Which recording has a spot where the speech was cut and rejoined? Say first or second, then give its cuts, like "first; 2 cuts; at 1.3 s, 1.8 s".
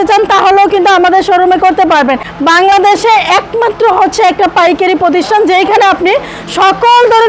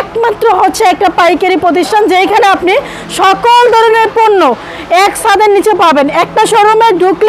first; 1 cut; at 2.3 s